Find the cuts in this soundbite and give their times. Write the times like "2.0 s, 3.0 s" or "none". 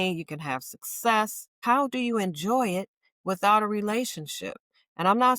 1.5 s